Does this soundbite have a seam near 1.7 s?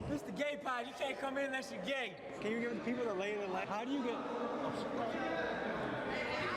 no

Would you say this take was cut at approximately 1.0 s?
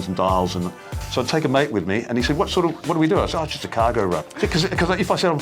yes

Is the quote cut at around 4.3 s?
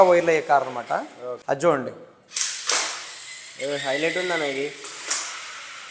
no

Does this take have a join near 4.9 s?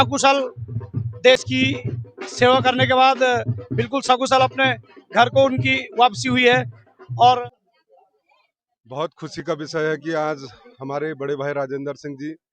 no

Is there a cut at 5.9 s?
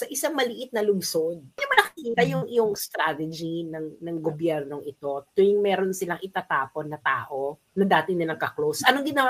no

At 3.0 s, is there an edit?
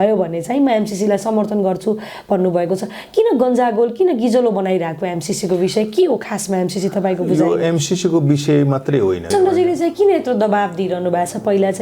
no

